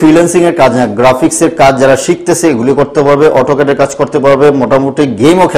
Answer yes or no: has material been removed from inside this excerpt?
no